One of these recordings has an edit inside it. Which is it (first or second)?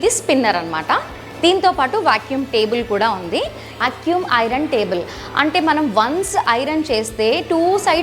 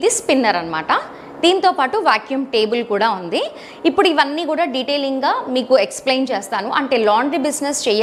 first